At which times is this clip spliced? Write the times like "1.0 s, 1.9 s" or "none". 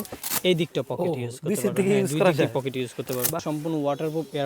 3.4 s